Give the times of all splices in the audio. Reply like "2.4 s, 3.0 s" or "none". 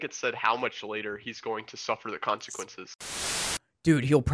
3.1 s

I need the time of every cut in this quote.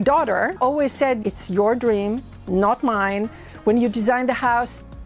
1.1 s

